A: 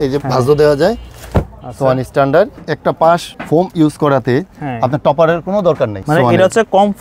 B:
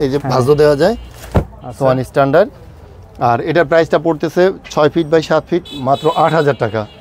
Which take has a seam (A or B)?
A